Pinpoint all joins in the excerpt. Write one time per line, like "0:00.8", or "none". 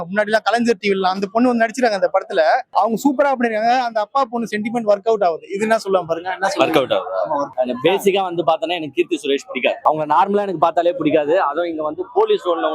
0:02.7
0:07.5
0:09.8